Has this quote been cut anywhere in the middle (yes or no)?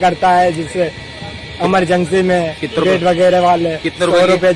no